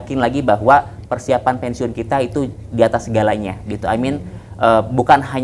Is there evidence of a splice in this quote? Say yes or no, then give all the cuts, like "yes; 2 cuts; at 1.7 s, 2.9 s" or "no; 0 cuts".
no; 0 cuts